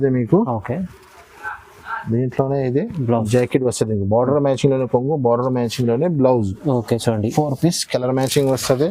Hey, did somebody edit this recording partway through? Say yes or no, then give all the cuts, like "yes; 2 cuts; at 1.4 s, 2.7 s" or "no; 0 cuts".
no; 0 cuts